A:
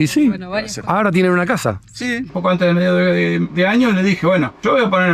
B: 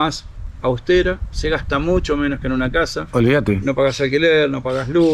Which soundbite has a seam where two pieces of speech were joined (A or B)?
A